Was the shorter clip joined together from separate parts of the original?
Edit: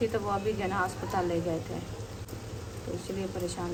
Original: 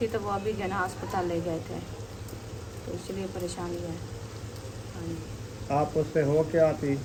no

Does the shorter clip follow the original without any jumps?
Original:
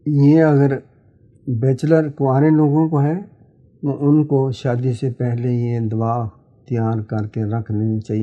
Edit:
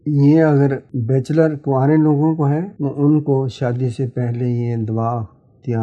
no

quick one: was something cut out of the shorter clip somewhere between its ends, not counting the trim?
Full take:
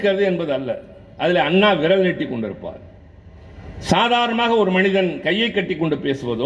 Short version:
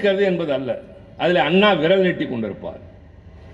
no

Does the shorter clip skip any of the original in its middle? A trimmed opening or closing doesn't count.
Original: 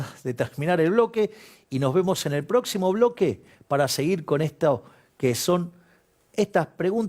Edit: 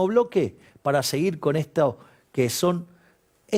no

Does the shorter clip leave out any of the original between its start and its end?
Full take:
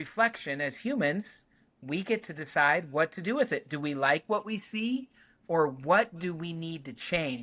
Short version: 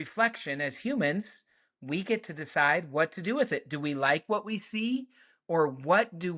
no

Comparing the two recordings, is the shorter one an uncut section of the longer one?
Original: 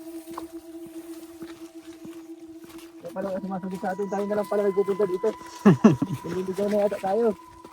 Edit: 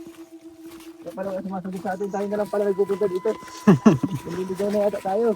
no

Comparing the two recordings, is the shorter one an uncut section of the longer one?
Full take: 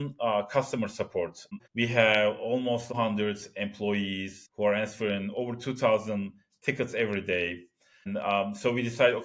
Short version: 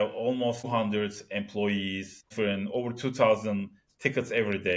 no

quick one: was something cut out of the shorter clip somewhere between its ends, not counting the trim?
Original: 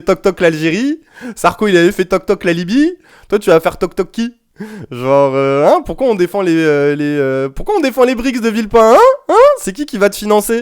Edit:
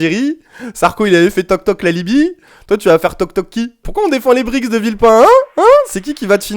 yes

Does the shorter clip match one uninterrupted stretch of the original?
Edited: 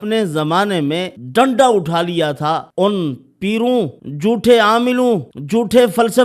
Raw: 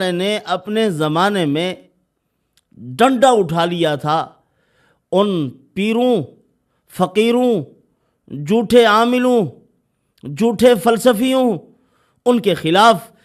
no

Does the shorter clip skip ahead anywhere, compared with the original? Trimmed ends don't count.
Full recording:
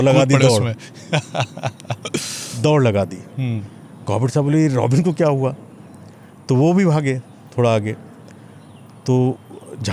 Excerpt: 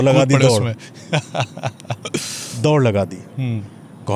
no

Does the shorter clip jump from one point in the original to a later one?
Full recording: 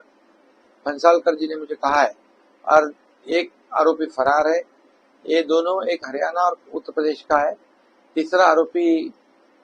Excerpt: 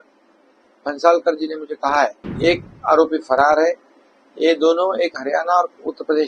yes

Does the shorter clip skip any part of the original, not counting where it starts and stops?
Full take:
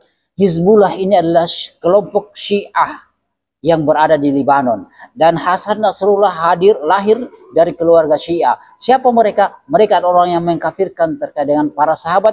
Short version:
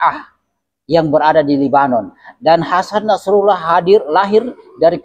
no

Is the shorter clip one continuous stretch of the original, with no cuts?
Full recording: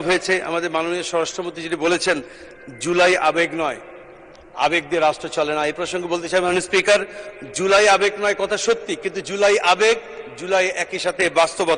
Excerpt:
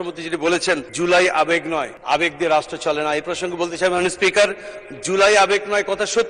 no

